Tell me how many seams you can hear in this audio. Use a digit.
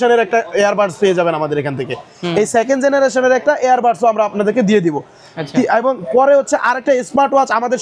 0